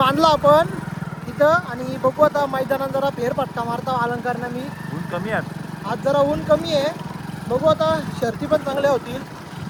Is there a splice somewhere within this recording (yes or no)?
no